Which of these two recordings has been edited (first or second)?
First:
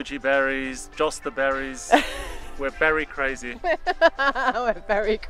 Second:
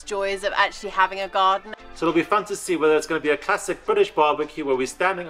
second